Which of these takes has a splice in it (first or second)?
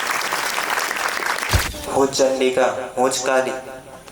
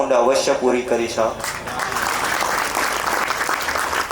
first